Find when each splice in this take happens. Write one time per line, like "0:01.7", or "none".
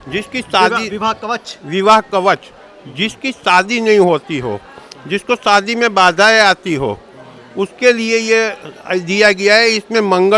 none